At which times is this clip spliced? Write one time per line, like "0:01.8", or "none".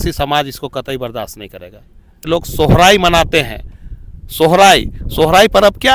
0:02.3